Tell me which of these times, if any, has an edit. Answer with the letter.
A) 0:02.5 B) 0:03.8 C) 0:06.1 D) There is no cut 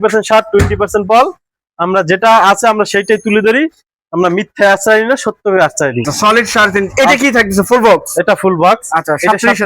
C